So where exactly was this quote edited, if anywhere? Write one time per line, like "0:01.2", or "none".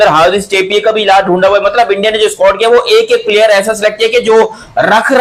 none

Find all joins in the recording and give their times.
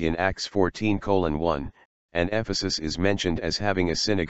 0:02.3

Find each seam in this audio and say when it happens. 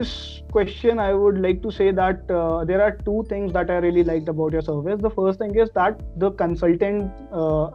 none

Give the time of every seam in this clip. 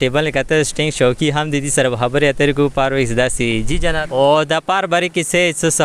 0:03.9

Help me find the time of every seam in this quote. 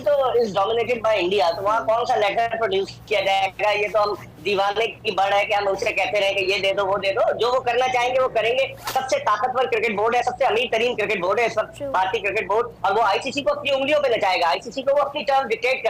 none

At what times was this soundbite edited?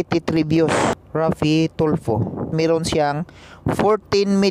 0:01.0
0:02.4

